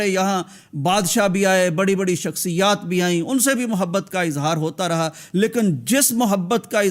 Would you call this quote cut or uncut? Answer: uncut